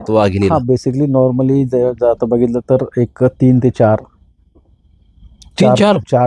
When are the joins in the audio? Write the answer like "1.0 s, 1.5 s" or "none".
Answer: none

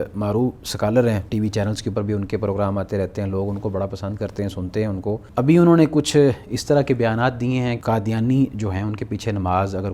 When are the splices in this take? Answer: 1.3 s, 5.3 s, 7.8 s

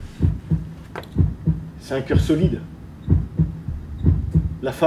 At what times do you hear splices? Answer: none

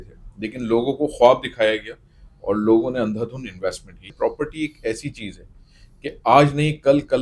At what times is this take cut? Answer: 4.0 s

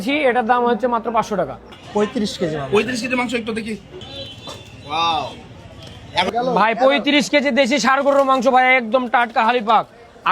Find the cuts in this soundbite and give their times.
1.5 s

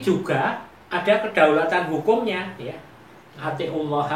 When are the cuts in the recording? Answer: none

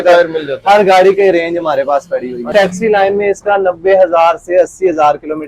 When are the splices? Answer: 2.5 s

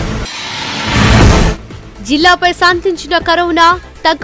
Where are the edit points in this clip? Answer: 1.2 s

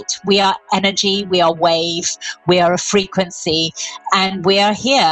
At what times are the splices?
4.0 s

